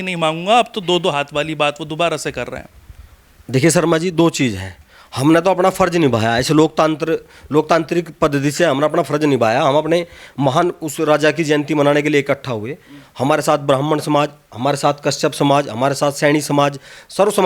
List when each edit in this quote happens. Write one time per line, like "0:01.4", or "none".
none